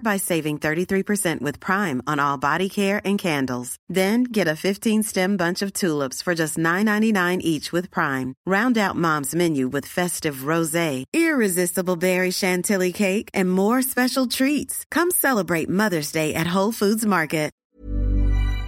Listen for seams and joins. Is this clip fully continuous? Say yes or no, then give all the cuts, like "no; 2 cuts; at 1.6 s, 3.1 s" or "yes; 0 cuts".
no; 1 cut; at 17.6 s